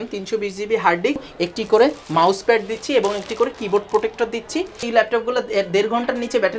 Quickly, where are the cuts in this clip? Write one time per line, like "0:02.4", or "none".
0:01.3
0:04.9